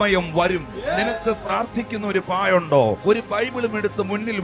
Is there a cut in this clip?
yes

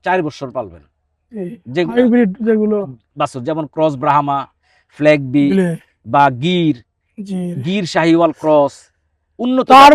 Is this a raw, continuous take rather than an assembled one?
yes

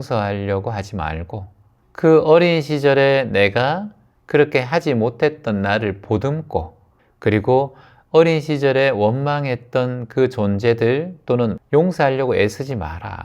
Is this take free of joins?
no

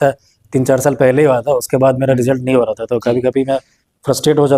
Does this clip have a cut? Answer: no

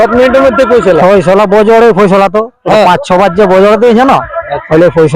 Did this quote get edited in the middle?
no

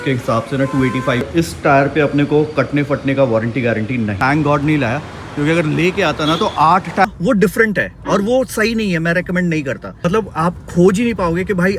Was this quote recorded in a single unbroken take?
no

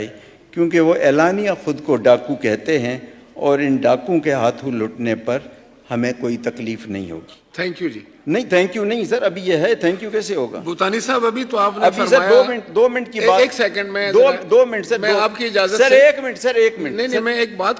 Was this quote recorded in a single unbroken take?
yes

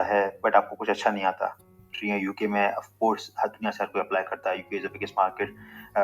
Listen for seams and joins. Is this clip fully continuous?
no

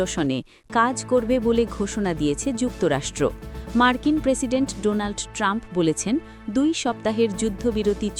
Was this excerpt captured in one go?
yes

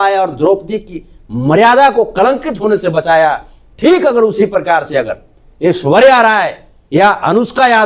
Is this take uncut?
yes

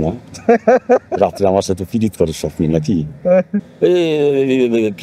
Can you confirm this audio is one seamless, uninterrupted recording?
no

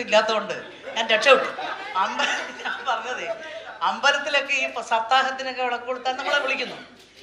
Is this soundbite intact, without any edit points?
no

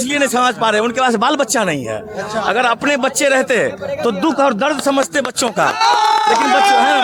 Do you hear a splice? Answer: no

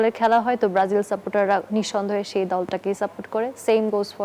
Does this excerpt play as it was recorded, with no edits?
yes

